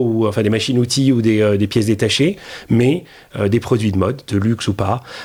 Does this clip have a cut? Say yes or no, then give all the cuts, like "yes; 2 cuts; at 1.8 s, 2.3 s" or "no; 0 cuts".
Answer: no; 0 cuts